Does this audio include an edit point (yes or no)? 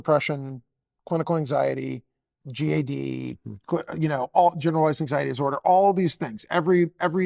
no